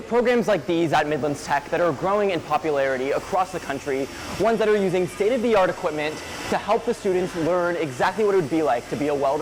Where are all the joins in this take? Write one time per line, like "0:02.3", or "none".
none